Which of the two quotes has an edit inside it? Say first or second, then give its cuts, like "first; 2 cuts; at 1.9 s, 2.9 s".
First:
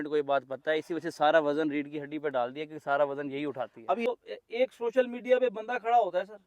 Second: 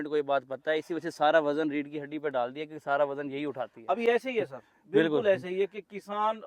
first; 1 cut; at 4.1 s